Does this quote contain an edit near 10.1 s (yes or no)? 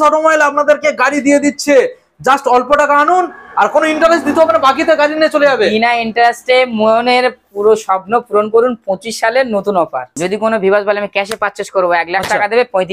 yes